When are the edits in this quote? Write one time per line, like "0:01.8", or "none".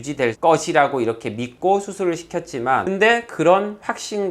0:02.8